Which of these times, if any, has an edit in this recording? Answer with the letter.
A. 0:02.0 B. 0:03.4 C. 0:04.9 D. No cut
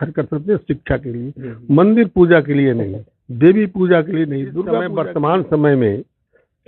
C